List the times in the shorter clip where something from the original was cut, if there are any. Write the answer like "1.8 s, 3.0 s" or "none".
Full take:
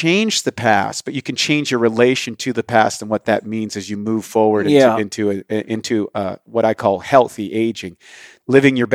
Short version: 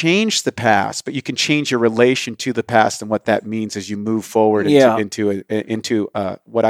none

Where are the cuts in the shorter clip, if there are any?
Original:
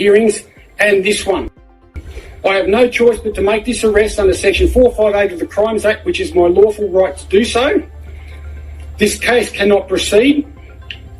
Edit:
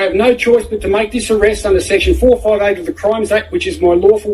none

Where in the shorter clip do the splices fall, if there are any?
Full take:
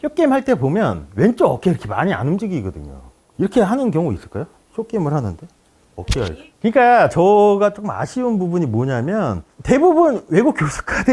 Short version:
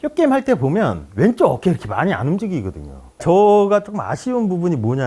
3.2 s

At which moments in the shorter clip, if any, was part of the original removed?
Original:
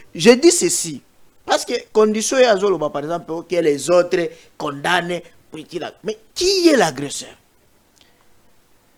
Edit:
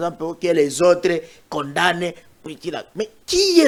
none

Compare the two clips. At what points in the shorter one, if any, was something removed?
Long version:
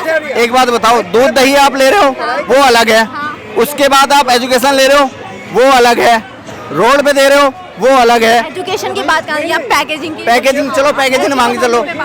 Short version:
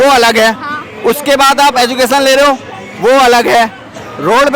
none

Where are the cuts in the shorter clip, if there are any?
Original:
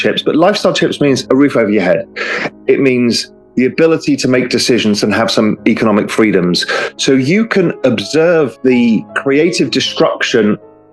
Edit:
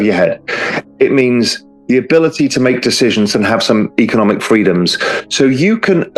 none

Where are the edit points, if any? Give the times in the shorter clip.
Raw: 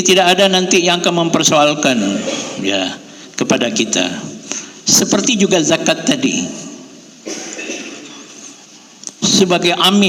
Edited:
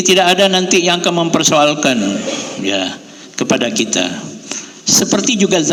none

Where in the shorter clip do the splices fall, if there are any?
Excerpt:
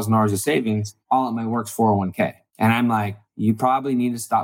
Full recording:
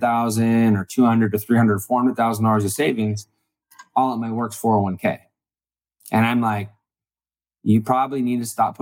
0.9 s, 2.4 s, 3.2 s

